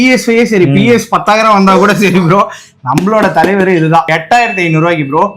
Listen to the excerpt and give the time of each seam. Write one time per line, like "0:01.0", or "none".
0:04.1